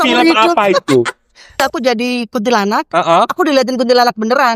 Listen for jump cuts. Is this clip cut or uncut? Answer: cut